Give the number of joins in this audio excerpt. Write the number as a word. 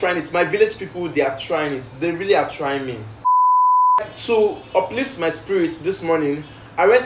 zero